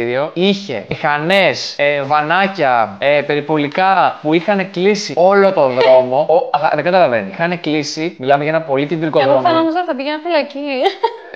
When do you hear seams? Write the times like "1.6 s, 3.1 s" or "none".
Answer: none